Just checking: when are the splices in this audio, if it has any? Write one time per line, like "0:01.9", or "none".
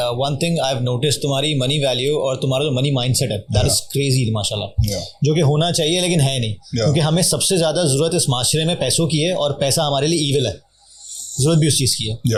none